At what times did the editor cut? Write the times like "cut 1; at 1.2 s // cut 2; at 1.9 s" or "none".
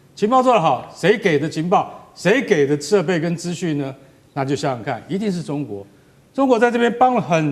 none